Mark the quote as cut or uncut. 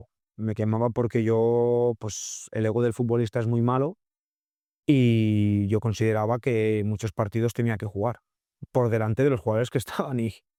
uncut